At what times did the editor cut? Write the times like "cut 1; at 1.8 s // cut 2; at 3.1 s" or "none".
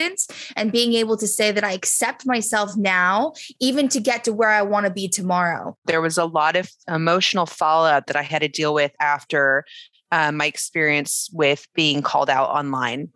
cut 1; at 5.8 s // cut 2; at 6.8 s